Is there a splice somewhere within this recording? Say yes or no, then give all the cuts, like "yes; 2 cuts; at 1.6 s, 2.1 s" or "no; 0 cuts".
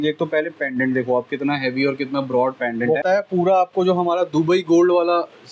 yes; 1 cut; at 3.0 s